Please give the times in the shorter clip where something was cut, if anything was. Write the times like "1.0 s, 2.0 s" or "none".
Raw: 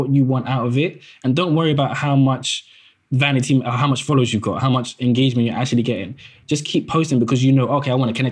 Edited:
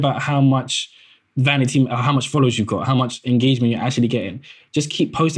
none

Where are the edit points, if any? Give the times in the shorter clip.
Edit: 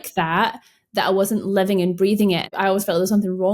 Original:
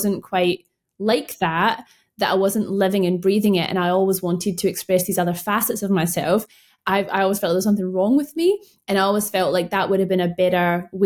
2.5 s

